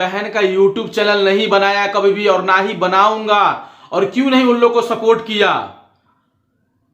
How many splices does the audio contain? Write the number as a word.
zero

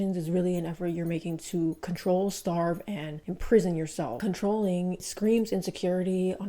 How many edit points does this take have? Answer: two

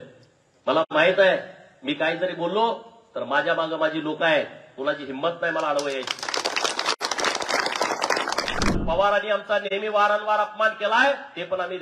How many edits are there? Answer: one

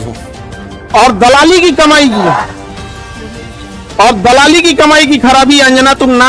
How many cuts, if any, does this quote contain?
zero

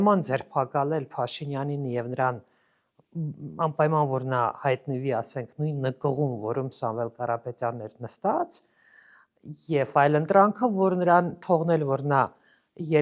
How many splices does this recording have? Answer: zero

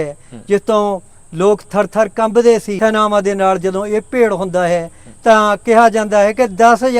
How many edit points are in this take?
one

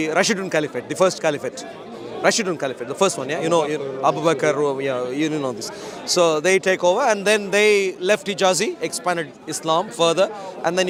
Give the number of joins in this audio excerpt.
zero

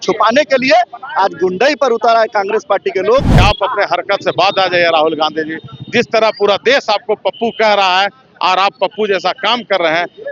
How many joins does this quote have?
one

